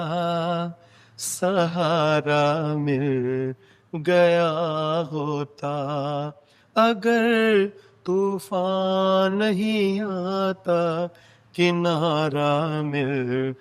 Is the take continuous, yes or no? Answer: yes